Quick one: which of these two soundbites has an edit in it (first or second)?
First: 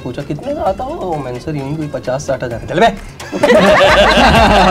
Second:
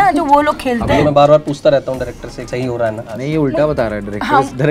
second